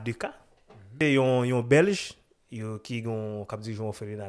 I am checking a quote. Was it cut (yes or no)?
yes